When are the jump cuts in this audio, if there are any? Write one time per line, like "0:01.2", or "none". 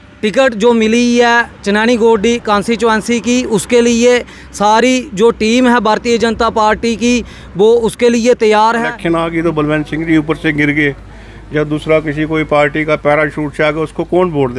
0:08.9